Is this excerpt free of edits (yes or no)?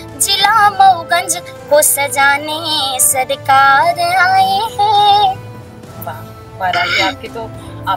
yes